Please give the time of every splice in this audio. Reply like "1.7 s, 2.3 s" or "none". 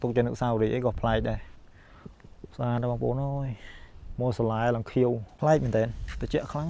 5.3 s